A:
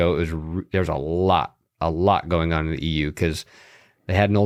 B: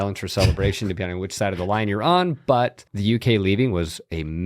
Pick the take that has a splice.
B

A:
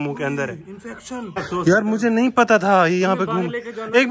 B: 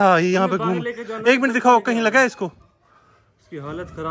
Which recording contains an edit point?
A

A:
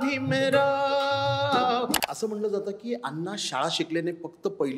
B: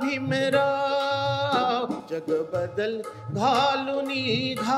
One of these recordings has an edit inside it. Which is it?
A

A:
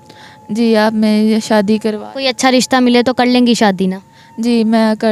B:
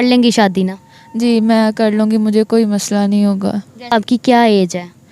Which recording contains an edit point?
B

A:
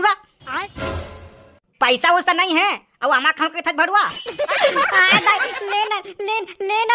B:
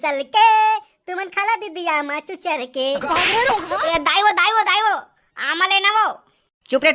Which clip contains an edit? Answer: B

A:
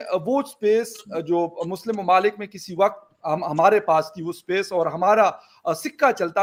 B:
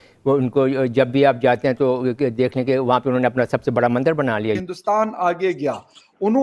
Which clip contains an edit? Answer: B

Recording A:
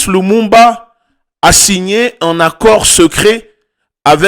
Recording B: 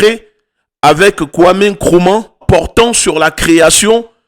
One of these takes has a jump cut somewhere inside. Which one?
B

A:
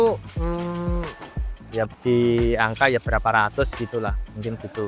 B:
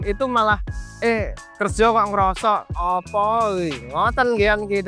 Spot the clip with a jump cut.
B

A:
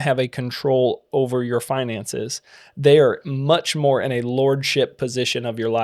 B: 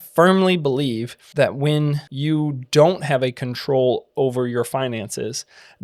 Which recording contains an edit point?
B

